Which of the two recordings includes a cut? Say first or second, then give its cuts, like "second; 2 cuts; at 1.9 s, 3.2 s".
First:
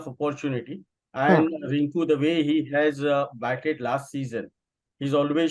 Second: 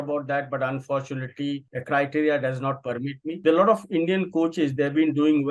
second; 2 cuts; at 1.7 s, 3.2 s